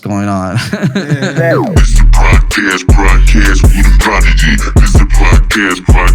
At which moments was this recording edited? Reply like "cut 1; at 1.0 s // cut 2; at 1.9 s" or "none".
cut 1; at 1.4 s